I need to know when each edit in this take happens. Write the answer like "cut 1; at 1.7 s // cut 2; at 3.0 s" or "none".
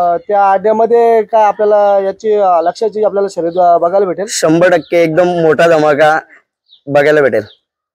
none